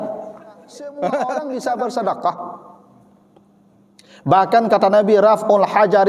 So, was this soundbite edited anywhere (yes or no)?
yes